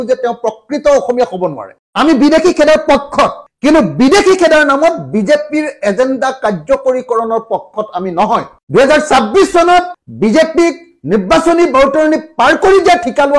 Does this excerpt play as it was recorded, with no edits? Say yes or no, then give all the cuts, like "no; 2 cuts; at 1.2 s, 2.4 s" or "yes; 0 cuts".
yes; 0 cuts